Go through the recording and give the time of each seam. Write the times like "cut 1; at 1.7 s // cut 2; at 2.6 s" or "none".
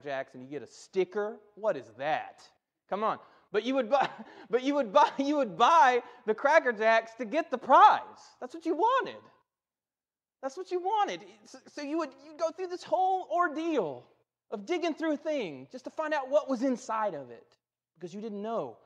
none